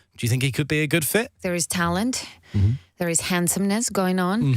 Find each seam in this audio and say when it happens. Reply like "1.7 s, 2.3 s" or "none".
1.3 s